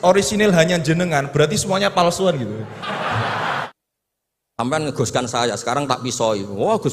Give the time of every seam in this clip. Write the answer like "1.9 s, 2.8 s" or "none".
3.7 s